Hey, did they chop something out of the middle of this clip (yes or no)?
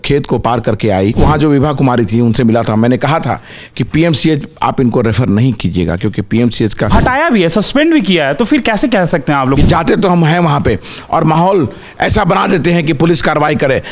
yes